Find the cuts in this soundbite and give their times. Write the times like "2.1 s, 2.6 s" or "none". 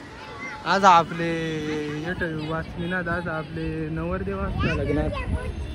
none

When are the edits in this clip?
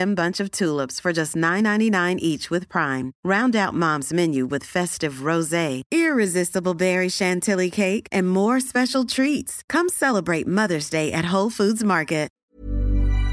12.4 s

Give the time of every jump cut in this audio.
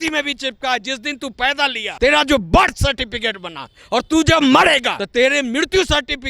1.8 s, 5.0 s

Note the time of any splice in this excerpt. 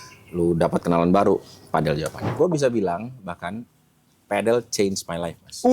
2.3 s

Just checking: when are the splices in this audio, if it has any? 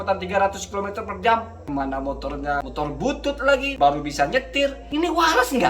1.6 s, 2.6 s, 3.7 s, 4.8 s

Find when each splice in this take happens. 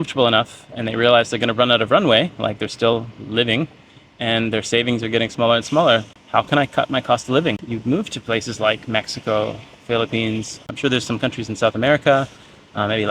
6.1 s, 7.6 s, 10.7 s

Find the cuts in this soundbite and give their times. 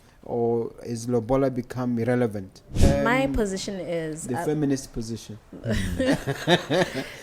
2.8 s

